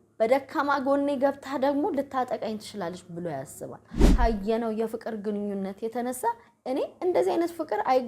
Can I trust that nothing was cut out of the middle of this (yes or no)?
no